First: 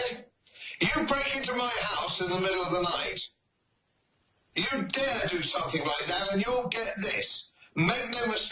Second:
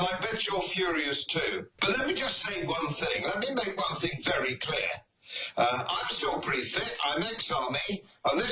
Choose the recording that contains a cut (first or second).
second